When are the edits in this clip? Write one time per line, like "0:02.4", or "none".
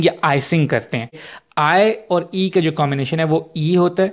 0:01.3